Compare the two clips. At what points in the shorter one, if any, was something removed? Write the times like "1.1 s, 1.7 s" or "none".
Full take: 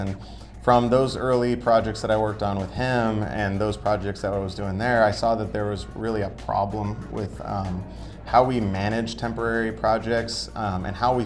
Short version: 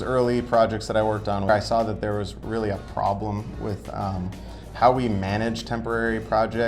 1.5 s